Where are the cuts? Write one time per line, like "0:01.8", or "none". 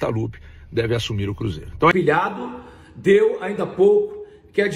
0:01.9